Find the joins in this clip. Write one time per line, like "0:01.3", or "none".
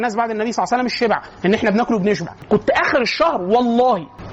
0:02.4